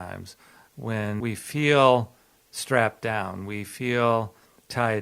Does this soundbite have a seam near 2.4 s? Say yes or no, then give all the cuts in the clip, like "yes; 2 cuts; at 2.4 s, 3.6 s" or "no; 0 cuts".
no; 1 cut; at 1.2 s